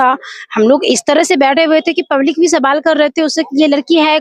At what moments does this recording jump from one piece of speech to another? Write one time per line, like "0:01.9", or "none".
none